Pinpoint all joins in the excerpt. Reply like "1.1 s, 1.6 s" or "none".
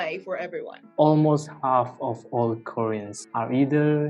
0.9 s, 3.2 s